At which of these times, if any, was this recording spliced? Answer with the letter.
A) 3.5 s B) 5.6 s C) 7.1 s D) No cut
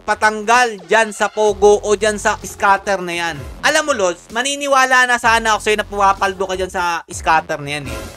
A